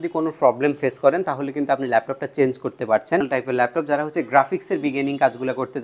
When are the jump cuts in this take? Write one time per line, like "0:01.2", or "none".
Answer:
0:03.3